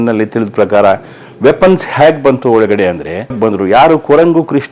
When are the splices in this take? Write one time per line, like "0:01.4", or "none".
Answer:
0:03.4